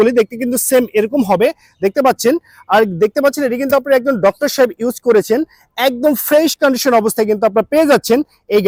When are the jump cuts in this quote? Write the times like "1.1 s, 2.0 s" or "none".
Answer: none